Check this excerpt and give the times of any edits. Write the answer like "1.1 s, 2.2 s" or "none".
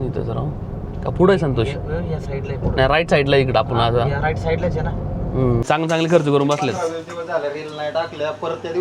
5.6 s